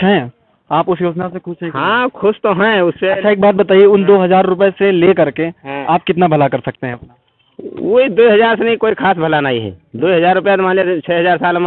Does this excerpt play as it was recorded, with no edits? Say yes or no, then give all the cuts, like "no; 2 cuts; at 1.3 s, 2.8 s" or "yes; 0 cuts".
yes; 0 cuts